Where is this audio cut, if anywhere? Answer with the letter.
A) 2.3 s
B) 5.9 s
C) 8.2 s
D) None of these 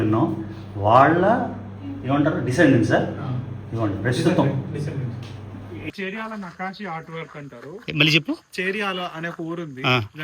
B